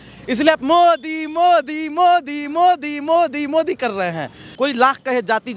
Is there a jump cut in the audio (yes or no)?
yes